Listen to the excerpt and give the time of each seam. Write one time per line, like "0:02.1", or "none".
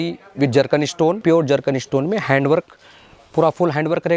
0:01.2